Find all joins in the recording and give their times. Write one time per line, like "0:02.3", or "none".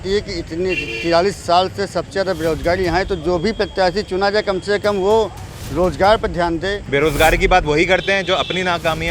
0:06.8